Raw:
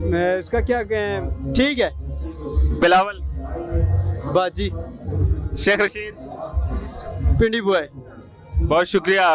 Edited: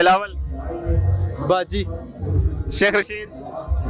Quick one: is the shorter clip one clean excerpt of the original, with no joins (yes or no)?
yes